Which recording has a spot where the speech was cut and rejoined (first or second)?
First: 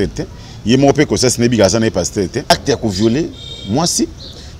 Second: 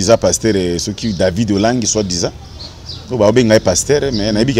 first